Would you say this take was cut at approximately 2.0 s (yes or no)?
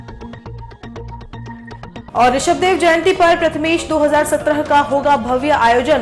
yes